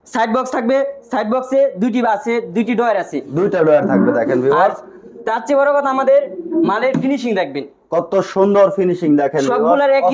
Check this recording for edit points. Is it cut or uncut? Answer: uncut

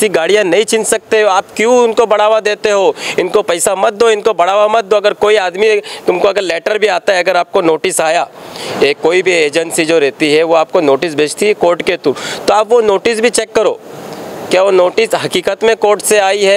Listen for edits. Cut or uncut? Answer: uncut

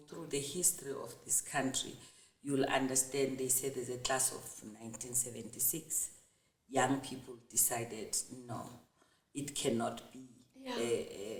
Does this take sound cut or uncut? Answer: uncut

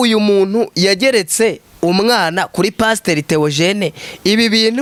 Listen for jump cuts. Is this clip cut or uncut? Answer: uncut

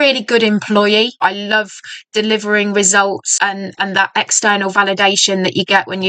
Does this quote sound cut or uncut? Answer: cut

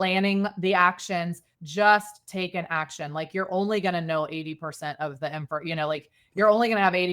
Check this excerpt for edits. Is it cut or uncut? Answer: cut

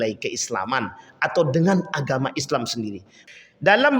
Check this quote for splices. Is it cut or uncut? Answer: cut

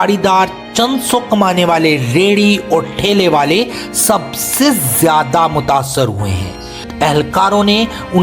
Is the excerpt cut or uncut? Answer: cut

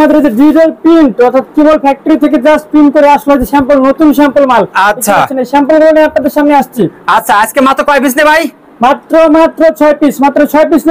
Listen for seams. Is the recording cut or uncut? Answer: uncut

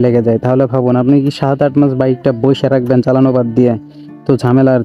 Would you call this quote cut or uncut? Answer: uncut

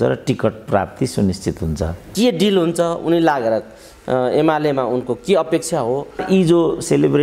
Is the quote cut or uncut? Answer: cut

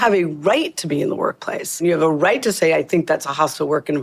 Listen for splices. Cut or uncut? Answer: cut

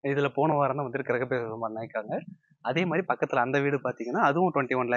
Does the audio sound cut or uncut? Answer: uncut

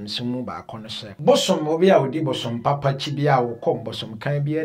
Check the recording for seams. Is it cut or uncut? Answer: cut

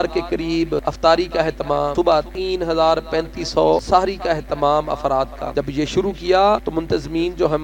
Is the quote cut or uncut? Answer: cut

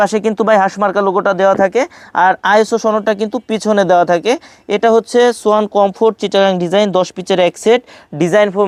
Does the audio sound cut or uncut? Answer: uncut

